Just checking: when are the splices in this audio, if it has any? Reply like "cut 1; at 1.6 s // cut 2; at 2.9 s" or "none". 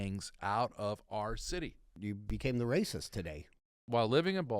cut 1; at 2.0 s // cut 2; at 3.6 s